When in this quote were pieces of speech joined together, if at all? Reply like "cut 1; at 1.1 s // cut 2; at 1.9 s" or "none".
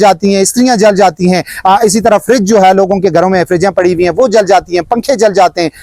none